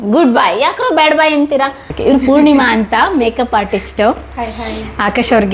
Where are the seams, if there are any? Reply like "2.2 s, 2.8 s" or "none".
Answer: 1.8 s